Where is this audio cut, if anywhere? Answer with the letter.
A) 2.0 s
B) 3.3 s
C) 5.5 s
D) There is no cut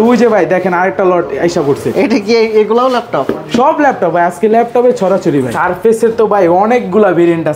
C